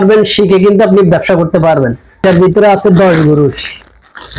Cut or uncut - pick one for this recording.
cut